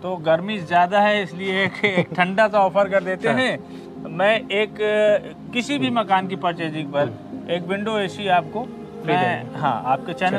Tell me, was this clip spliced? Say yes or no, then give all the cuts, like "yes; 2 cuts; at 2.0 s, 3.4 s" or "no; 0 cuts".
no; 0 cuts